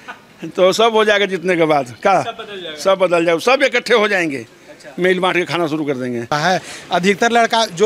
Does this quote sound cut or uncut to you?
cut